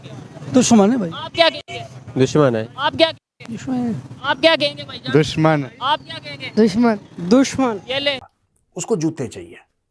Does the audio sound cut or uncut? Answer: cut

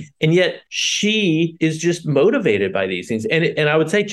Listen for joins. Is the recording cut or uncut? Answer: uncut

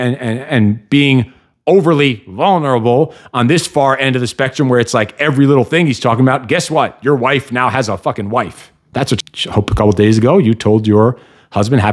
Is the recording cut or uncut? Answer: cut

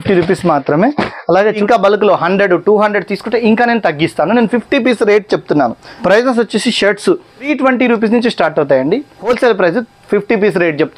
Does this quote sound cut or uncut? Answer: cut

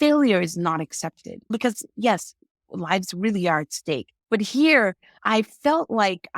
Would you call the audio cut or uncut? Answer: cut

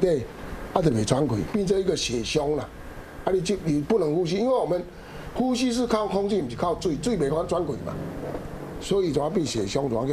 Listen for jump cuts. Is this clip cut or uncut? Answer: cut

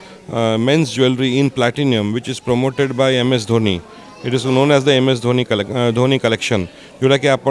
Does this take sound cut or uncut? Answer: uncut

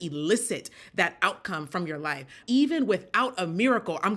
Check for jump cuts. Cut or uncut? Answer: cut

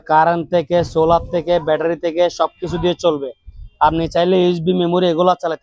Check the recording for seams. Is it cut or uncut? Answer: uncut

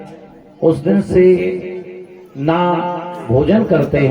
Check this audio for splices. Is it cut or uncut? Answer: uncut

